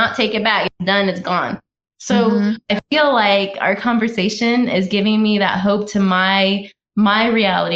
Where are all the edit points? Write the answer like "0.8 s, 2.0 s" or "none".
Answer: none